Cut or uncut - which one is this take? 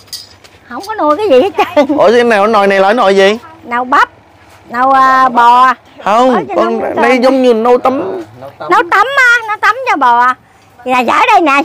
uncut